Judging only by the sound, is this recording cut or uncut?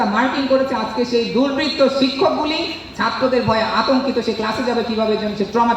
uncut